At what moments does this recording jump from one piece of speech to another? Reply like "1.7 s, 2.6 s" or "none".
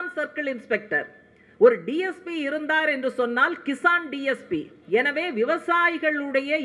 none